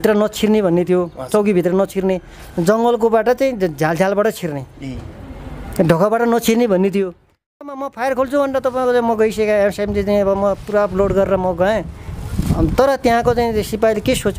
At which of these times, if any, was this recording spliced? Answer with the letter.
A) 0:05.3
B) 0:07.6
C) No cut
B